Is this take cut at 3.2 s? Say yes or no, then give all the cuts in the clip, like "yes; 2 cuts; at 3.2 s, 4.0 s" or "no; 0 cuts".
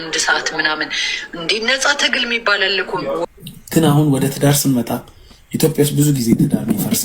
yes; 1 cut; at 3.2 s